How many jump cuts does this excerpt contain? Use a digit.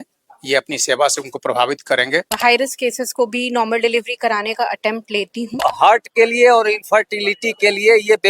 2